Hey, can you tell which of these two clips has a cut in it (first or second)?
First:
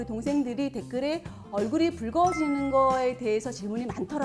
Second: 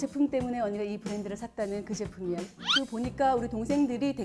second